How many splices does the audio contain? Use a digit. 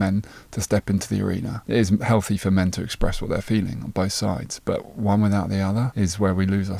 2